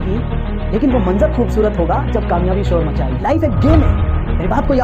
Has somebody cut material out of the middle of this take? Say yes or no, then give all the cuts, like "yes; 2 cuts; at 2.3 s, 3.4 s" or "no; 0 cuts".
yes; 1 cut; at 3.1 s